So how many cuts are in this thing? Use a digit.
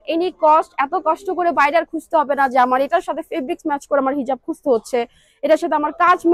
0